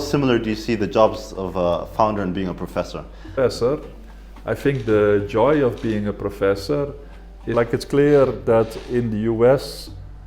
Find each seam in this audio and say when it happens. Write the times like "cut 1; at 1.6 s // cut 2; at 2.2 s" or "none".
cut 1; at 3.2 s // cut 2; at 7.5 s